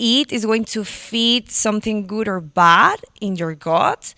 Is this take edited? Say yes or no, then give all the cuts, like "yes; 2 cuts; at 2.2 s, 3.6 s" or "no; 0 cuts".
no; 0 cuts